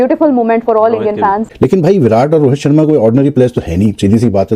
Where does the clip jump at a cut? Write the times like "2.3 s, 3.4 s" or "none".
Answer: 1.5 s